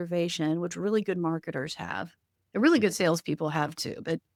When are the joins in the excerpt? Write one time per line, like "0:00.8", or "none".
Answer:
none